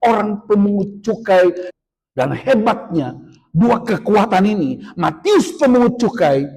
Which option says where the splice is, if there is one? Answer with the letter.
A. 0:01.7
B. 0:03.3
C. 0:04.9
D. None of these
A